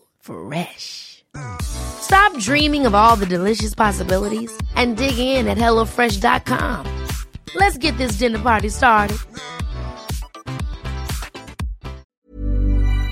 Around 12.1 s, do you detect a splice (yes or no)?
yes